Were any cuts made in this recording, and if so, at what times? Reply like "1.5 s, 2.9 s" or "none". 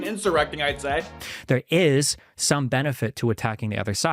none